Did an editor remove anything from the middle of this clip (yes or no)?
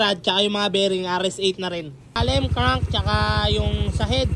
yes